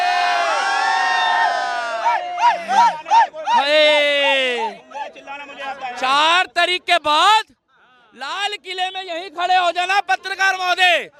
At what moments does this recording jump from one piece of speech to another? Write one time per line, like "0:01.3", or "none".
none